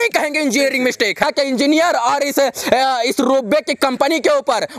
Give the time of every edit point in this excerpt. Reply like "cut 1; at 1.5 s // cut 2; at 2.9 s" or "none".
cut 1; at 1.2 s